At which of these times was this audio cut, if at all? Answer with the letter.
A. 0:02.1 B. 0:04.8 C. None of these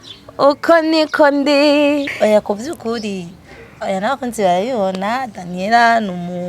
A